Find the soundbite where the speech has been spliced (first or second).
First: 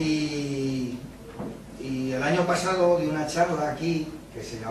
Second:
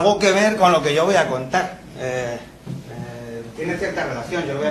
first